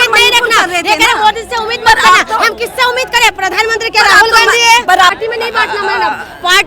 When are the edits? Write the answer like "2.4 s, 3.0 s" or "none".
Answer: 5.2 s